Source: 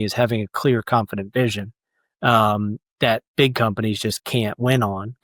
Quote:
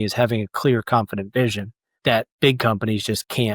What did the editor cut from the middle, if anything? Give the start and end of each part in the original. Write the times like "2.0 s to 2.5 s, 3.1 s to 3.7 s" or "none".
1.9 s to 2.8 s